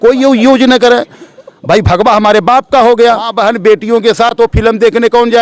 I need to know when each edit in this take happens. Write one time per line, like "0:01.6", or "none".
0:03.3